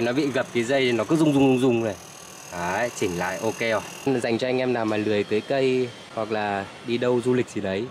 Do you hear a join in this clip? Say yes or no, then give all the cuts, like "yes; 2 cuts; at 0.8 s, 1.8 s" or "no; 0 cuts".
yes; 2 cuts; at 3.9 s, 6.0 s